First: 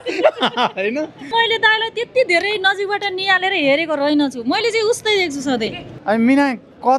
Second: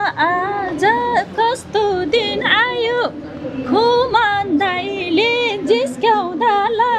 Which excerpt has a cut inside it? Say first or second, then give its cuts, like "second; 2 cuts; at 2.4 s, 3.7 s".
first; 2 cuts; at 1.3 s, 5.9 s